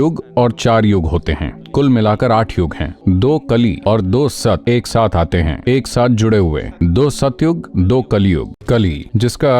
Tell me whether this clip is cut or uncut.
cut